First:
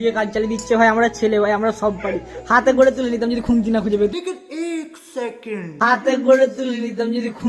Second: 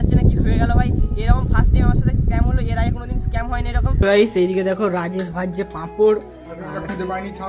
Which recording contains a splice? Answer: second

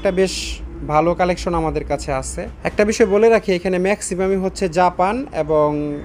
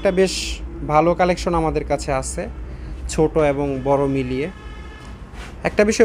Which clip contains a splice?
first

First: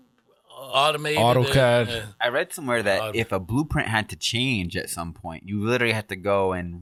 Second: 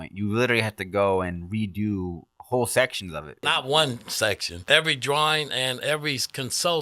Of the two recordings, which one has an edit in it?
second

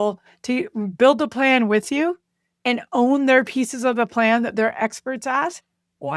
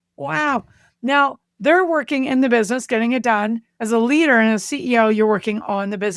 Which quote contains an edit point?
second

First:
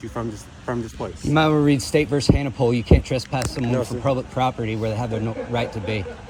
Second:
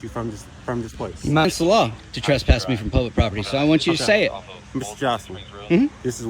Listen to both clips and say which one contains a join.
second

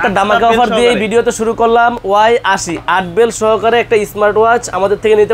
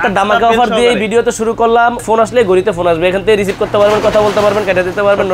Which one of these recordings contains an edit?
second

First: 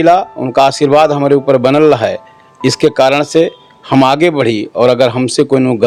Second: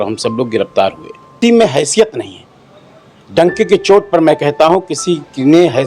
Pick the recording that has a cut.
second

